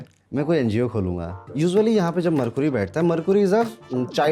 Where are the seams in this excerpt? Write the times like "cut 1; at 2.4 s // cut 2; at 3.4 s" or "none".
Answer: cut 1; at 1.4 s